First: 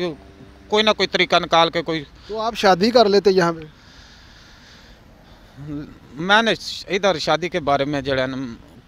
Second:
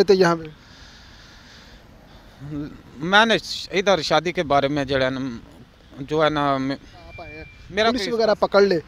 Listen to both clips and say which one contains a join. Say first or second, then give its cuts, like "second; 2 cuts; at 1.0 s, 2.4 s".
second; 1 cut; at 7.6 s